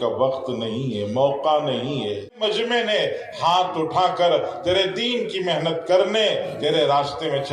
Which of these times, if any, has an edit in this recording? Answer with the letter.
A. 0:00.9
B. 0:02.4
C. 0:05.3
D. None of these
B